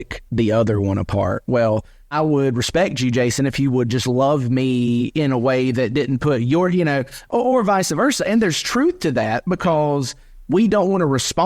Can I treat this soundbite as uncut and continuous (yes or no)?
no